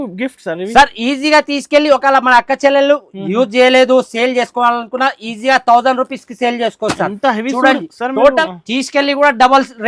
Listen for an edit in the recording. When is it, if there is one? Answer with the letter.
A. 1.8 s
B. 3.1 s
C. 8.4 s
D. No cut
C